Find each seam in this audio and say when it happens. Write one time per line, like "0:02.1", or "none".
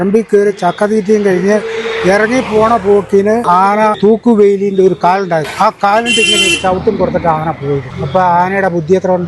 0:03.8
0:05.5
0:07.9